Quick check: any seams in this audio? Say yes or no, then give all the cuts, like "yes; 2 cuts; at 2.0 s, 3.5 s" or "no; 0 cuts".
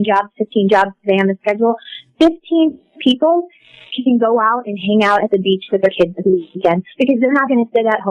no; 0 cuts